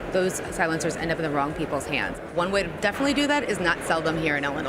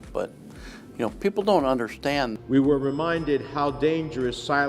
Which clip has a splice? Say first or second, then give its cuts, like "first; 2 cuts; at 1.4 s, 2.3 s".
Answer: second; 1 cut; at 2.4 s